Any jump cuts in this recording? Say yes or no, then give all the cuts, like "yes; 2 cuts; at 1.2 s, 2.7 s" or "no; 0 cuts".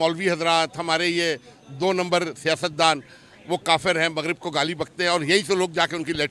no; 0 cuts